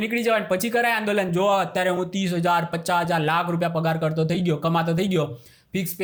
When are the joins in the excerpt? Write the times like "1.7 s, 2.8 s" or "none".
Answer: none